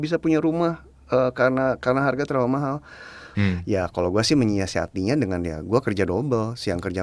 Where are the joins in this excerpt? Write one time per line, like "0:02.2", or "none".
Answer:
none